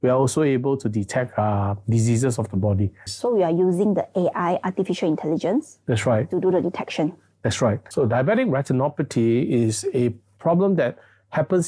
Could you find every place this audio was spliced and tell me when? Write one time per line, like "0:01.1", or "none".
0:03.1
0:07.8